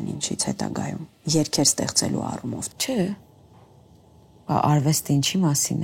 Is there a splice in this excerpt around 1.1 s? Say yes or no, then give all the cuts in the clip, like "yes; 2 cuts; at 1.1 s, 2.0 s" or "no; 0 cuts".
yes; 2 cuts; at 1.1 s, 2.7 s